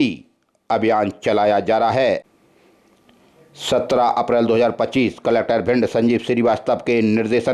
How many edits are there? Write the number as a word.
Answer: one